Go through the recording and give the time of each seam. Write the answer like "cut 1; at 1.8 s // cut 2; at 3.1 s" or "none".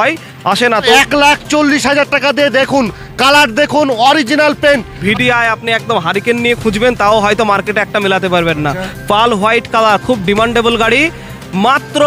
cut 1; at 0.9 s // cut 2; at 4.9 s